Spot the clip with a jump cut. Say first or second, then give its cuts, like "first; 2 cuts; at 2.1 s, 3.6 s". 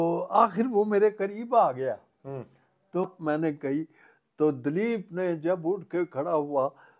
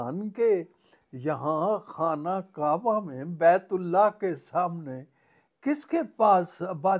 first; 1 cut; at 3.0 s